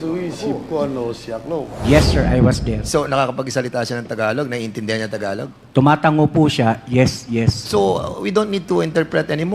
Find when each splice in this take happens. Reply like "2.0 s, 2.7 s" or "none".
1.8 s